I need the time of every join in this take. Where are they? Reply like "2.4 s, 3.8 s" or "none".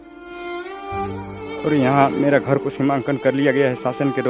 1.6 s